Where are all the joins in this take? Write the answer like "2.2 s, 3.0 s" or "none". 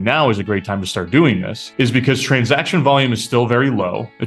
1.6 s